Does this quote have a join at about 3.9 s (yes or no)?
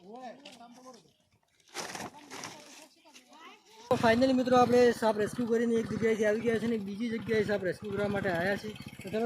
yes